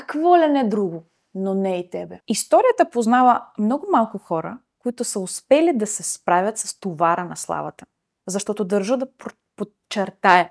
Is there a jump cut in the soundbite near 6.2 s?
no; 1 cut; at 2.1 s

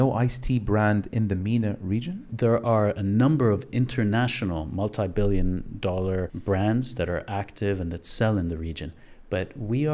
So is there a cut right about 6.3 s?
yes; 2 cuts; at 2.3 s, 6.3 s

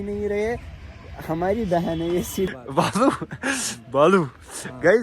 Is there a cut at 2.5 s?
yes; 1 cut; at 2.5 s

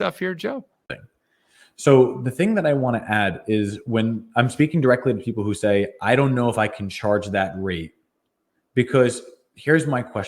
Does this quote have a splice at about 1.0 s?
yes; 1 cut; at 1.0 s

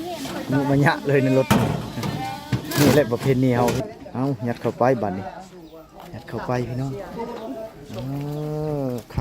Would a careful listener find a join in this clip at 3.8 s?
yes; 1 cut; at 3.8 s

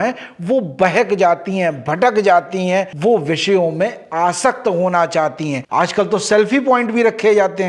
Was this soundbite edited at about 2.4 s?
no; 1 cut; at 5.6 s

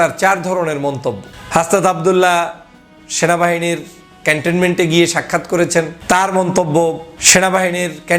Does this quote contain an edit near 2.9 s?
no; 3 cuts; at 1.3 s, 6.0 s, 7.1 s

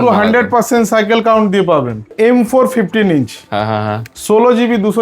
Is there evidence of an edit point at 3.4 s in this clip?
no; 1 cut; at 2.1 s

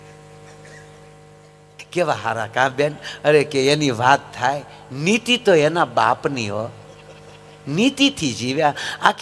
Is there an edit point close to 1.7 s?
yes; 1 cut; at 1.7 s

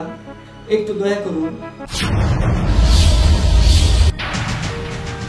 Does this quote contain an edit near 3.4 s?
no; 1 cut; at 1.9 s

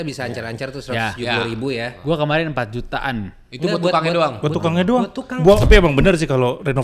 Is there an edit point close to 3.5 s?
no; 1 cut; at 5.6 s

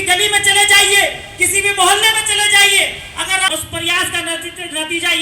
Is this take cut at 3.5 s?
yes; 1 cut; at 3.5 s

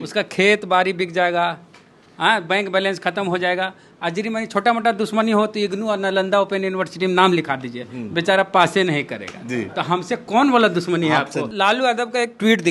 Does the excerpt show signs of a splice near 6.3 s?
no; 1 cut; at 11.5 s

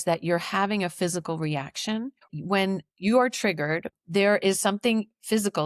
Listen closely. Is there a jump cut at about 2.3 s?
yes; 2 cuts; at 2.3 s, 3.9 s

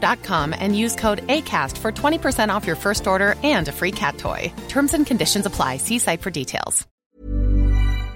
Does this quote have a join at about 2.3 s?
no; 1 cut; at 6.9 s

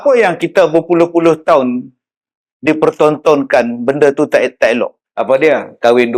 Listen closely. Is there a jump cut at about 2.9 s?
no; 1 cut; at 5.1 s

